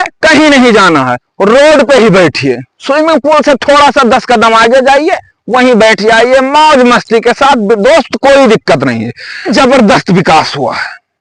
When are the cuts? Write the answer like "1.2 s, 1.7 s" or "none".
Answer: 9.5 s

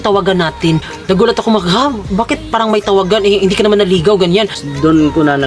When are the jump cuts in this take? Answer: 0.9 s, 4.6 s

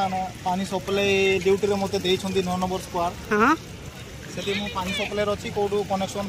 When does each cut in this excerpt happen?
none

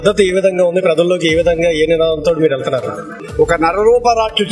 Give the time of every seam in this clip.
3.2 s

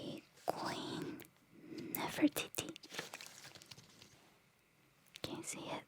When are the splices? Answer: 4.1 s

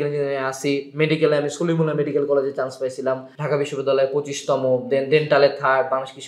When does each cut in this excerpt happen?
3.3 s

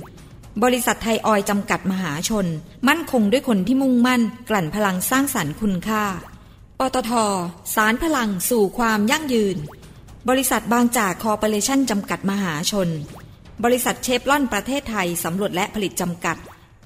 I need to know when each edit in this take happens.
none

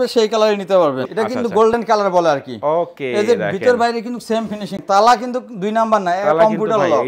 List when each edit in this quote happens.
1.0 s, 4.8 s

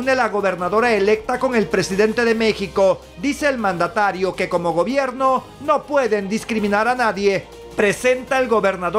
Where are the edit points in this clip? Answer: 7.6 s

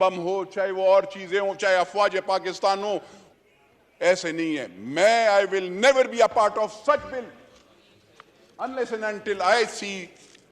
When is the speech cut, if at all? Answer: 3.2 s

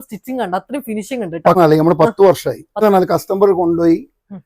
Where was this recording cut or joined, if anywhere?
1.6 s, 2.8 s

